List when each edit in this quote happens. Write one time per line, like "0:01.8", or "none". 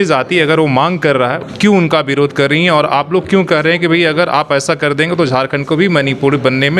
0:01.4

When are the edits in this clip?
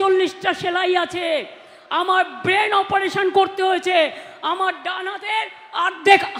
none

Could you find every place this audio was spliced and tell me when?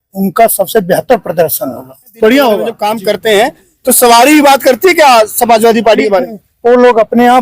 0:02.8

